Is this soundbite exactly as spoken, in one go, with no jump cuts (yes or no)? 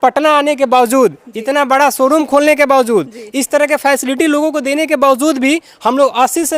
yes